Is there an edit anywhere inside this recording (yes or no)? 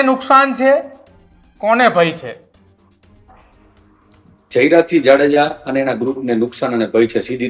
no